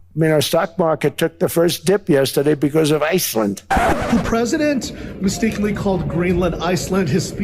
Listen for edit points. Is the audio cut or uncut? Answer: cut